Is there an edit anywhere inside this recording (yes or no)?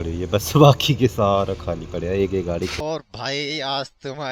yes